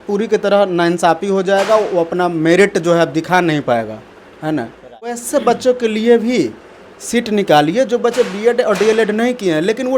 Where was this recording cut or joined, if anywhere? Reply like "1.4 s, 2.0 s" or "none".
5.2 s